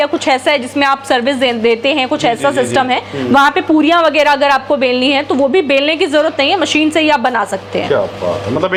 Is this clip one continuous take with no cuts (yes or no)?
yes